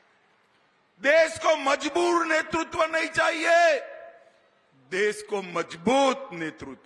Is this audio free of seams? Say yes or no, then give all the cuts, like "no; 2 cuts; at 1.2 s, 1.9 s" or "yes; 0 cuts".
yes; 0 cuts